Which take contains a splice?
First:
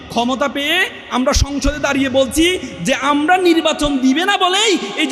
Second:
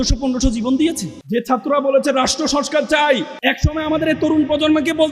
second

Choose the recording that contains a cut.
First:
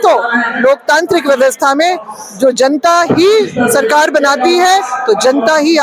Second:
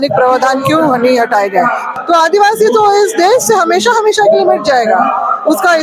second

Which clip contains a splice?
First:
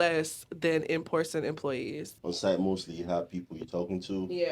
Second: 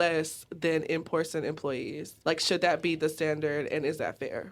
first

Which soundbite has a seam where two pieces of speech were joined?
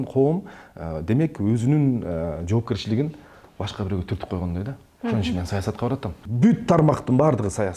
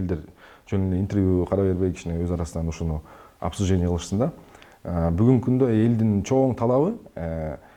first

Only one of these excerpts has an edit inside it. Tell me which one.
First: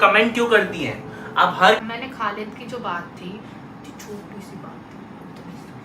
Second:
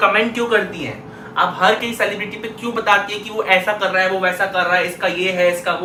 first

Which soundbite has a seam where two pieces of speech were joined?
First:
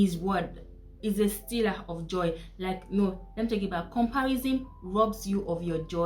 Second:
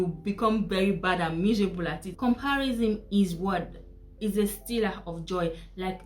second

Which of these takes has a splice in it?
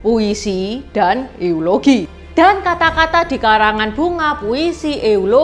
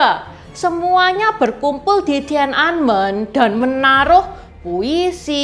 first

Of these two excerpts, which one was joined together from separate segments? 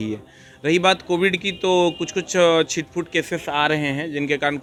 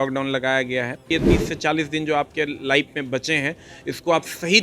second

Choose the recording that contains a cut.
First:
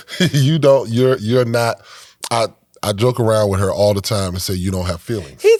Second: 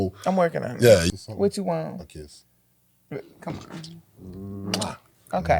second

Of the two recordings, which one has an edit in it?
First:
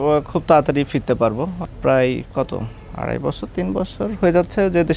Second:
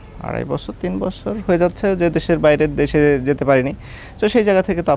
first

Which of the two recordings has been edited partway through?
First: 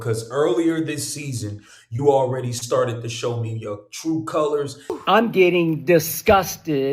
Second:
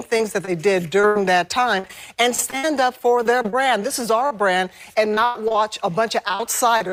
first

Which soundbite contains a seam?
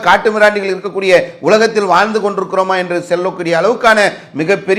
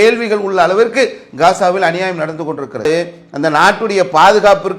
second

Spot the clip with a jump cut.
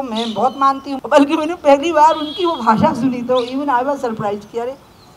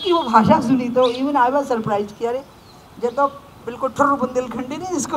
first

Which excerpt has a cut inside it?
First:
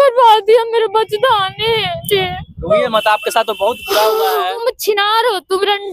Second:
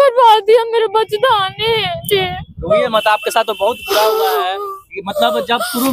first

